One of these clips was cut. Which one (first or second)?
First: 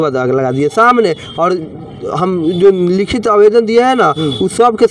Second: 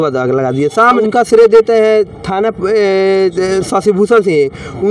second